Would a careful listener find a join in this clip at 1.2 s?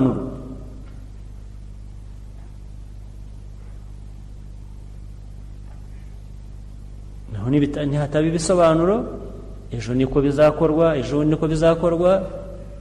no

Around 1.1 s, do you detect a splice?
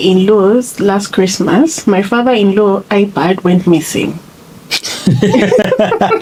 no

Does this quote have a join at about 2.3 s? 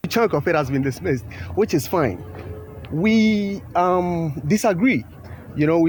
no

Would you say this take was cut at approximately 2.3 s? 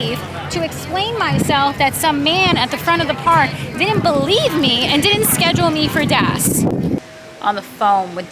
no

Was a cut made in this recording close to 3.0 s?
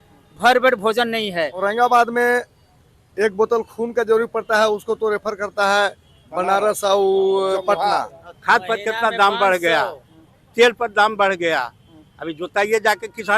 no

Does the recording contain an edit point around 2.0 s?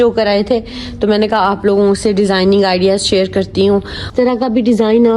no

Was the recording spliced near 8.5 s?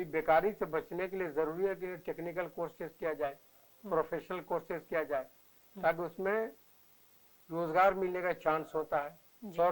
no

